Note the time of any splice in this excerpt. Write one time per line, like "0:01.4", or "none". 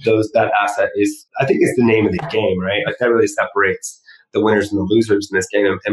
0:01.2